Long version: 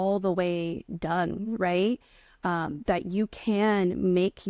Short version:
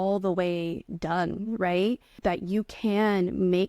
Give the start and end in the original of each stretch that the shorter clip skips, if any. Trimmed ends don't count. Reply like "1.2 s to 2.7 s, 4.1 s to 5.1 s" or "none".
2.1 s to 2.7 s